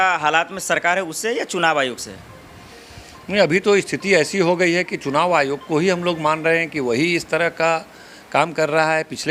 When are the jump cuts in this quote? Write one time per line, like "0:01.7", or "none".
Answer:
none